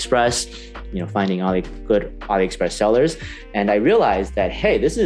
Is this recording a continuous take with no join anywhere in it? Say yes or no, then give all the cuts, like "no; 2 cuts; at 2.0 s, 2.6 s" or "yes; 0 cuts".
yes; 0 cuts